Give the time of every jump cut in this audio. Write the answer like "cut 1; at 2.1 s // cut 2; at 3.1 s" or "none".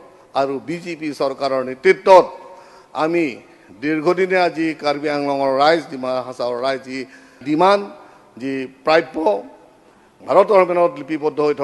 cut 1; at 7.4 s